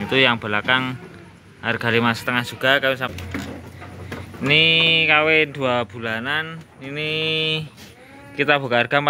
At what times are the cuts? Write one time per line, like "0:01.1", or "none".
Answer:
0:03.1